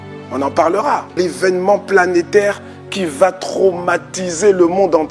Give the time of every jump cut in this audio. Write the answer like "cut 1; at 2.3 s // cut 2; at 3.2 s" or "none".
cut 1; at 1.1 s